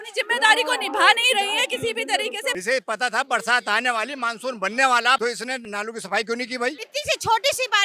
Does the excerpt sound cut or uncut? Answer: cut